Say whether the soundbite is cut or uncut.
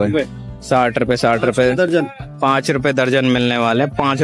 uncut